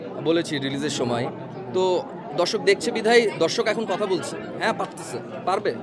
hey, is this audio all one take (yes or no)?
no